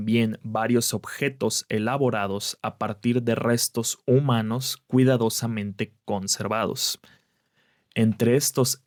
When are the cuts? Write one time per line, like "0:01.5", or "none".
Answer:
none